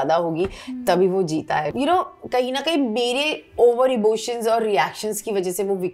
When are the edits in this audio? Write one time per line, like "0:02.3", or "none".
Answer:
0:01.7